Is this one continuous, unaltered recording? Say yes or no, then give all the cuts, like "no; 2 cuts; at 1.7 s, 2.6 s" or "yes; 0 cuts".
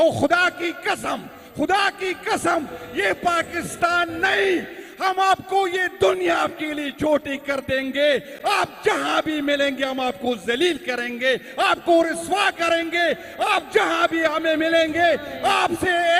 yes; 0 cuts